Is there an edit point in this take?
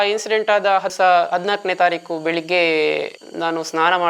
no; 0 cuts

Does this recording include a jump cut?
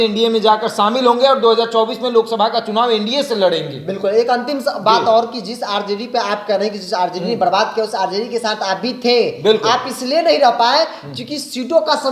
no; 0 cuts

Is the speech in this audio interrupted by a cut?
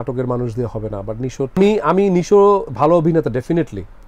yes; 1 cut; at 1.6 s

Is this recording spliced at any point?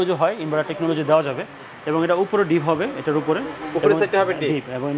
no; 0 cuts

